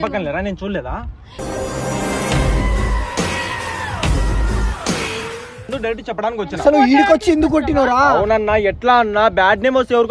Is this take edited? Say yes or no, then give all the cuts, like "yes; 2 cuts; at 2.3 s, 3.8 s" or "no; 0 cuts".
yes; 1 cut; at 5.6 s